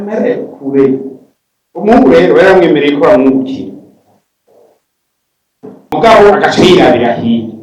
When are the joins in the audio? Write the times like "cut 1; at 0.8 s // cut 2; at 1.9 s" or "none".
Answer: cut 1; at 5.9 s